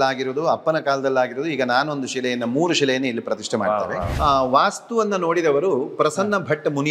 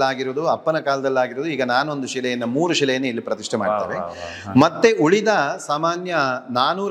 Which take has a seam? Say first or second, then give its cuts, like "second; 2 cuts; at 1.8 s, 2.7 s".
first; 1 cut; at 4.1 s